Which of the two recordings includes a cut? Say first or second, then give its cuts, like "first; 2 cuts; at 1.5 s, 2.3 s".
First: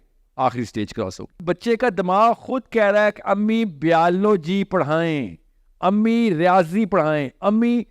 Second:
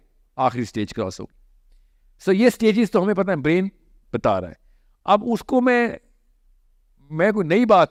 first; 1 cut; at 1.3 s